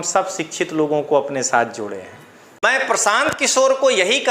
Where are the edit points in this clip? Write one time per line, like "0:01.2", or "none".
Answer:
0:02.6